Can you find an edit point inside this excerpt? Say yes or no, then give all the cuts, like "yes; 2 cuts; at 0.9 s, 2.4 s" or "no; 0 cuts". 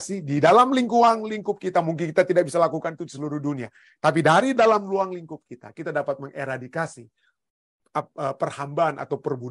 no; 0 cuts